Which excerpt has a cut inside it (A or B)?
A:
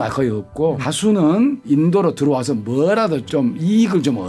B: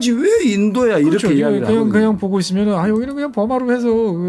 A